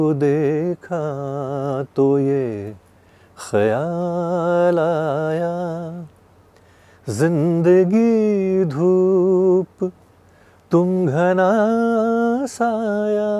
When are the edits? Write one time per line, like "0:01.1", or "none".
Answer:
none